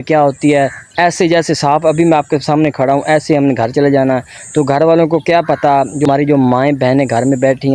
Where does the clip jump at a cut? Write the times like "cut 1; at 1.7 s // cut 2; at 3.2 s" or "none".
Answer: cut 1; at 6.1 s

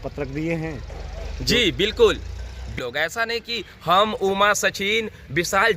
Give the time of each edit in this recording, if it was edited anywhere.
cut 1; at 2.7 s

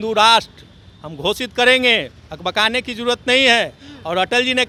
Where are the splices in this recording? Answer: none

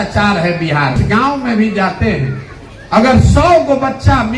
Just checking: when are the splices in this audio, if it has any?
cut 1; at 1.0 s

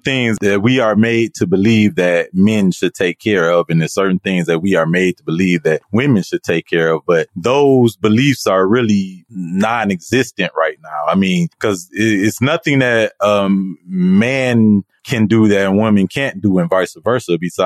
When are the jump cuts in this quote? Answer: cut 1; at 5.8 s // cut 2; at 7.3 s // cut 3; at 11.5 s

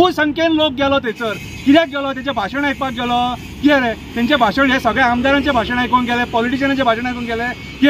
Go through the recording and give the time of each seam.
none

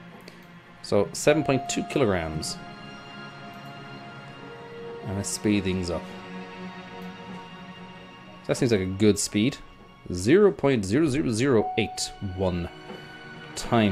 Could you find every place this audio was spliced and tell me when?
none

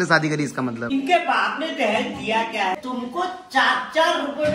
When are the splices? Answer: cut 1; at 0.8 s // cut 2; at 2.8 s

